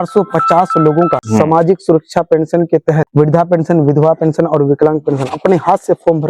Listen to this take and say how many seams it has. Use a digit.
2